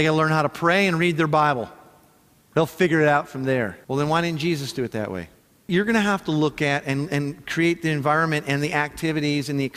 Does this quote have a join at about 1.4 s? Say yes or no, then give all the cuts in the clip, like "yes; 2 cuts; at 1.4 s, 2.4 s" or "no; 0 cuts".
no; 2 cuts; at 3.8 s, 5.7 s